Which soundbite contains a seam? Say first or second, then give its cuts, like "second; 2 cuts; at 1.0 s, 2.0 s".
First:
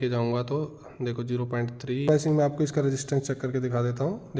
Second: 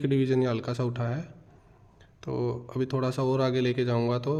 first; 1 cut; at 2.1 s